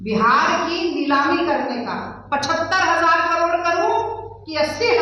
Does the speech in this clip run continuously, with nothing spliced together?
yes; 0 cuts

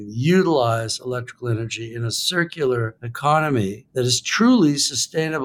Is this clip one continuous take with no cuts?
no; 2 cuts; at 3.0 s, 3.8 s

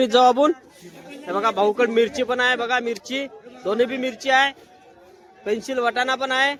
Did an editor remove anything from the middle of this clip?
no; 0 cuts

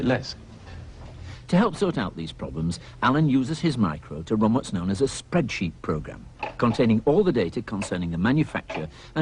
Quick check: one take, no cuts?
no; 1 cut; at 4.3 s

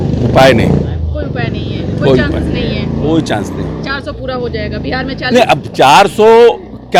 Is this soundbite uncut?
yes; 0 cuts

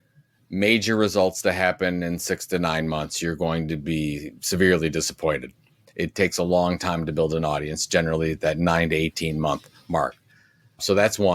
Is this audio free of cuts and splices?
yes; 0 cuts

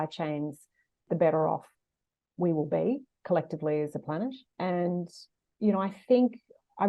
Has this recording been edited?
yes; 2 cuts; at 1.0 s, 4.4 s

